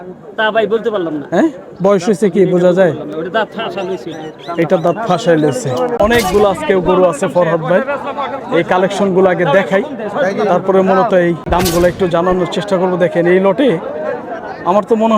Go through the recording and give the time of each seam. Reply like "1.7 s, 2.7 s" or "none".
6.0 s, 11.4 s